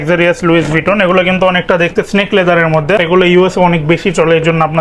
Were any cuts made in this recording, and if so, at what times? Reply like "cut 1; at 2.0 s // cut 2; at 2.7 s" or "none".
cut 1; at 3.0 s